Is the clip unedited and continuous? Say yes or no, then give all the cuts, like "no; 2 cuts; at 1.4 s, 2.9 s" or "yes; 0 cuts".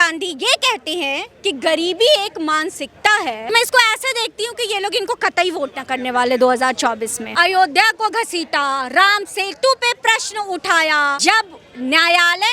no; 3 cuts; at 3.5 s, 7.2 s, 11.2 s